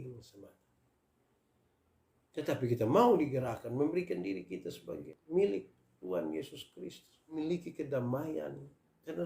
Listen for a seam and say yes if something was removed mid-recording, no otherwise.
yes